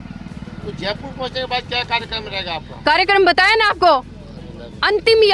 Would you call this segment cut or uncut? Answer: uncut